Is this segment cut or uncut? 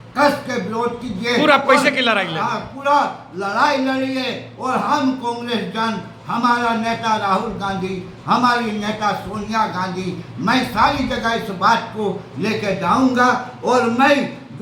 uncut